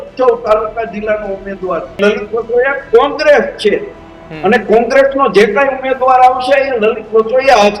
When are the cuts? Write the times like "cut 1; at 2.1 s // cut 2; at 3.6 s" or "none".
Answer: cut 1; at 2.0 s